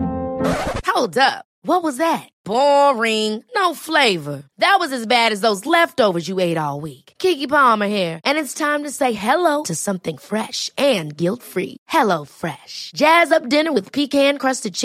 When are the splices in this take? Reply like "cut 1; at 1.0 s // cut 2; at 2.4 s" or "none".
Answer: none